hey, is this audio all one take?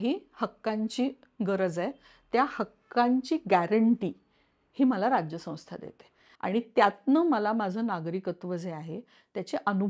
yes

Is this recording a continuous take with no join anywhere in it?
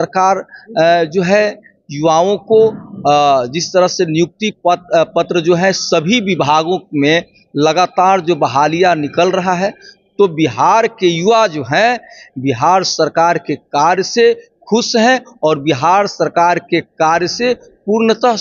yes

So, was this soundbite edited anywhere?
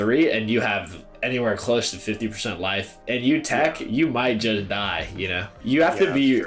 no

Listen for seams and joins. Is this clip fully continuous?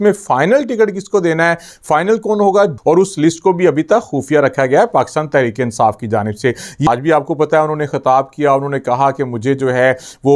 no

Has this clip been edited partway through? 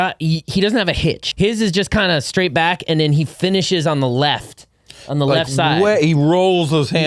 yes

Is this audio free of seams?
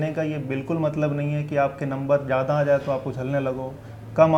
yes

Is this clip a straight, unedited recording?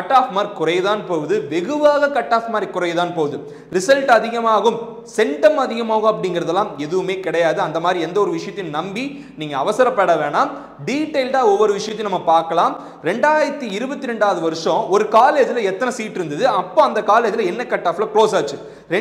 yes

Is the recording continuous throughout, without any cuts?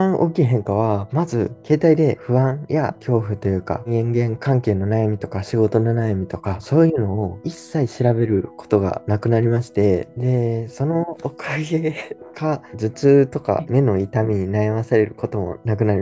yes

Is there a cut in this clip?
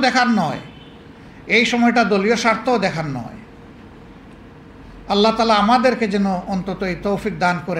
no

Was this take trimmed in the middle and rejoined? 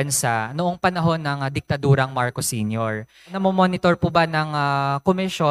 yes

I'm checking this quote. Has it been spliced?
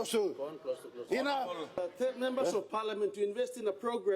yes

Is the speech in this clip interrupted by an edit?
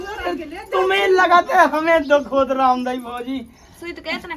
no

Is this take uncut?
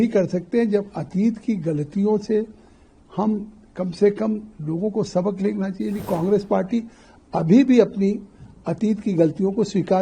no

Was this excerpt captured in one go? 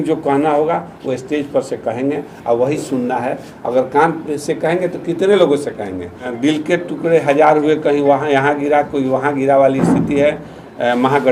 no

